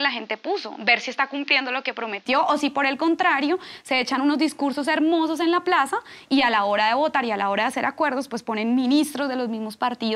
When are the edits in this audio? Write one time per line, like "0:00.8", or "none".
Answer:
none